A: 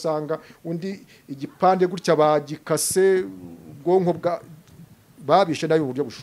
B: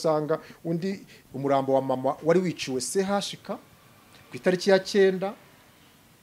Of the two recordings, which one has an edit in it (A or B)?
B